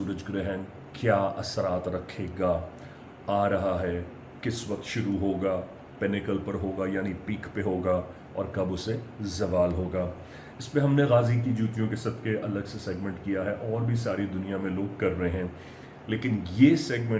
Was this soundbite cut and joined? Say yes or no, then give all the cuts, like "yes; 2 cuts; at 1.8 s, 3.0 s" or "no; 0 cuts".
no; 0 cuts